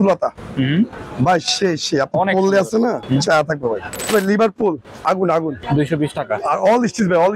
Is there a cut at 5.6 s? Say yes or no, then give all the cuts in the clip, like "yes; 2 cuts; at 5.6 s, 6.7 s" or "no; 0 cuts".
yes; 3 cuts; at 3.0 s, 4.1 s, 5.6 s